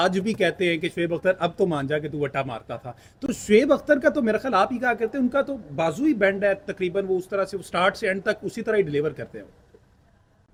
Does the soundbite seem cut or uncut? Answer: uncut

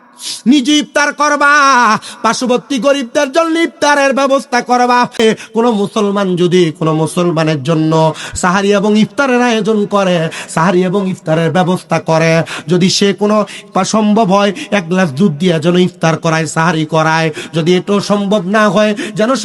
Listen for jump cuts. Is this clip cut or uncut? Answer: cut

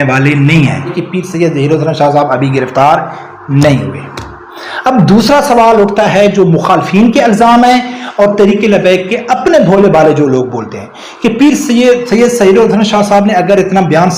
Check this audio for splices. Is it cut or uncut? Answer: cut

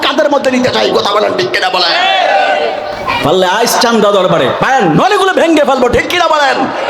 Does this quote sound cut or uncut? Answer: cut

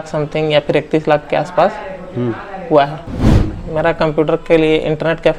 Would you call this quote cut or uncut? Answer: cut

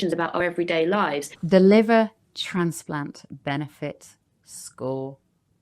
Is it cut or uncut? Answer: cut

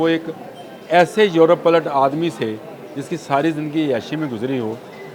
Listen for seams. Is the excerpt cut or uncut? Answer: uncut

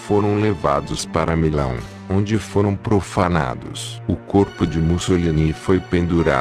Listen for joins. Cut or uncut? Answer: cut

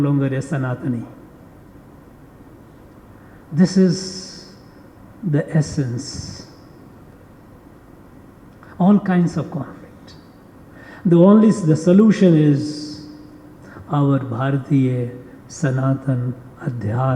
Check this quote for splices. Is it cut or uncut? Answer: cut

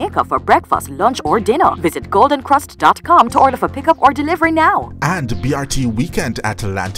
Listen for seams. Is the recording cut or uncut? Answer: cut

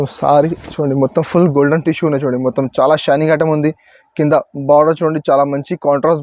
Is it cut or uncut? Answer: uncut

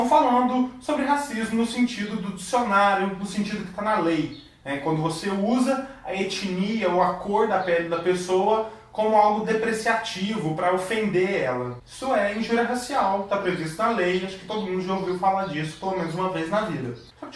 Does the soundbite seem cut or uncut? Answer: uncut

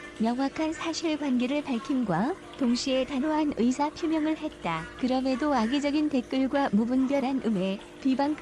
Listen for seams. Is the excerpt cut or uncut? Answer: cut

